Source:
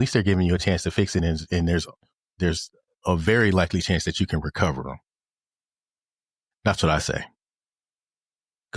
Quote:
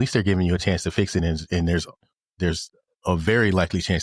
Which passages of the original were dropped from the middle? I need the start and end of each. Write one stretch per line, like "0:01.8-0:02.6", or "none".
none